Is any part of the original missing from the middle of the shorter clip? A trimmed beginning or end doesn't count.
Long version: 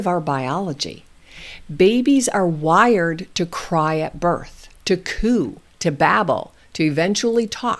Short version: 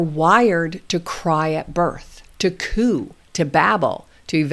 no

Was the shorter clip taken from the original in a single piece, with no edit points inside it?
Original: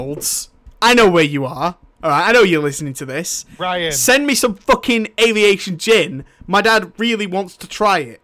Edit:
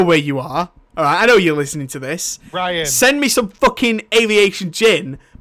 yes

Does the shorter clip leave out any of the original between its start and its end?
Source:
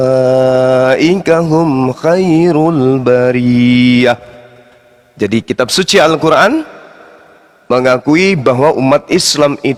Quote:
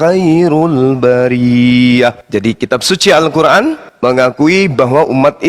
yes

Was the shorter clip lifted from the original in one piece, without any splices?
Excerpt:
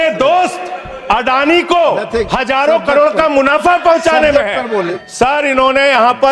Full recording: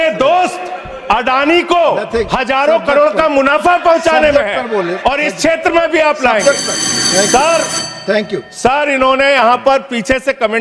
no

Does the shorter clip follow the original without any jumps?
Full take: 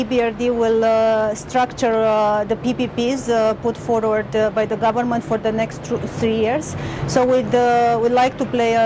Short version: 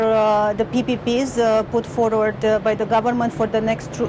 yes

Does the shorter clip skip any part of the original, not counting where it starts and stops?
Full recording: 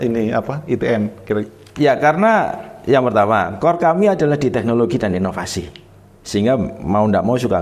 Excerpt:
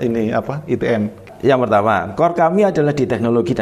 yes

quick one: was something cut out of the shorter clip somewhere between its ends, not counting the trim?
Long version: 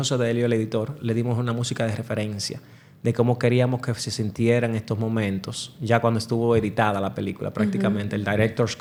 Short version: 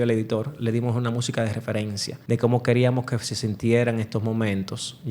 yes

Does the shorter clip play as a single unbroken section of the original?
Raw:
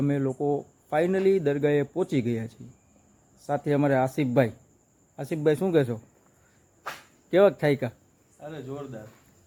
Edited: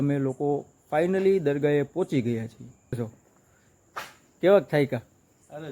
no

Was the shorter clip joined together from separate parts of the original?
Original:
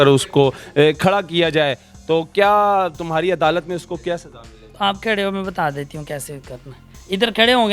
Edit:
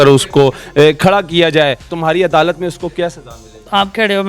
yes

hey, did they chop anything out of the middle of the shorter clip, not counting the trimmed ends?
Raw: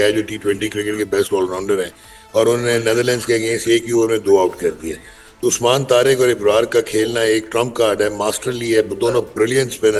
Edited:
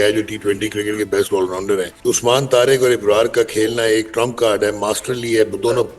yes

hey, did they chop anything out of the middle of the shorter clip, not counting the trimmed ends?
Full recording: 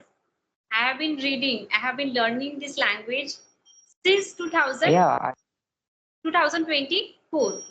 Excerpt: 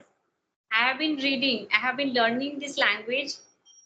no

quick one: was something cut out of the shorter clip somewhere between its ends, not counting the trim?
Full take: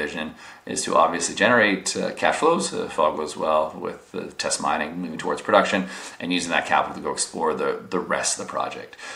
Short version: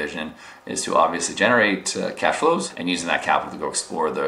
yes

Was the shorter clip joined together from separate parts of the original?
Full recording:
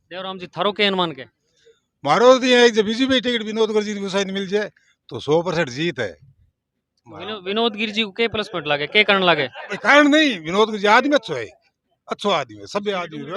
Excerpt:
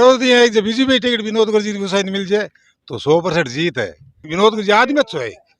yes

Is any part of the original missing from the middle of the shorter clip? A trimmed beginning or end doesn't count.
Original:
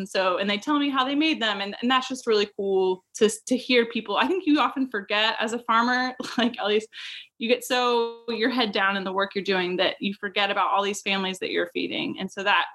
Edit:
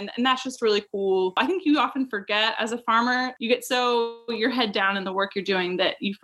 yes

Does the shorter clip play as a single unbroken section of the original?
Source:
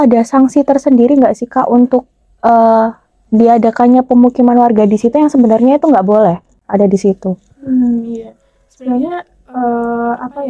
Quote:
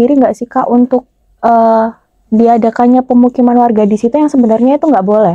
yes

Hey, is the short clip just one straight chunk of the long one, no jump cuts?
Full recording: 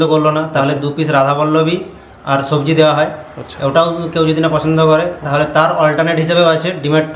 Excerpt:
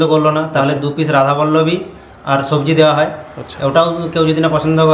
yes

